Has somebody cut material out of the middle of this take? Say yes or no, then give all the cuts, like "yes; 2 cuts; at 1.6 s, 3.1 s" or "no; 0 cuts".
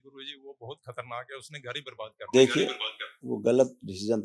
no; 0 cuts